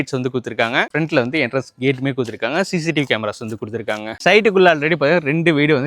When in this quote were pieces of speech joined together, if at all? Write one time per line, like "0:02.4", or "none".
0:00.9
0:04.2